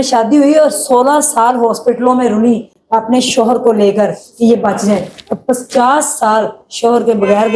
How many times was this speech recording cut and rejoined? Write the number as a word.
zero